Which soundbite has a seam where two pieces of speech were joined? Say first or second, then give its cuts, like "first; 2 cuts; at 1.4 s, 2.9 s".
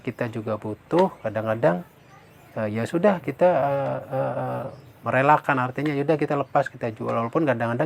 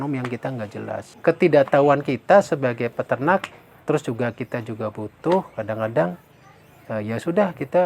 second; 1 cut; at 1.1 s